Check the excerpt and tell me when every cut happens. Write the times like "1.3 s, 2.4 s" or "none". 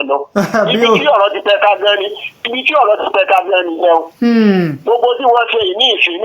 none